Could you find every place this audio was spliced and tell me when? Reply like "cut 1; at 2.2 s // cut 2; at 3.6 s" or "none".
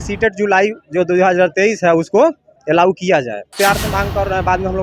cut 1; at 3.5 s